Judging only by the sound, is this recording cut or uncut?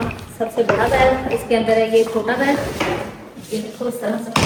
uncut